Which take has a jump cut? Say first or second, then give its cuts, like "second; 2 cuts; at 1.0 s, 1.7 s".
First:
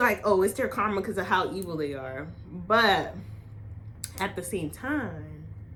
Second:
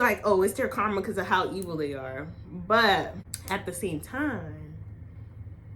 second; 1 cut; at 3.3 s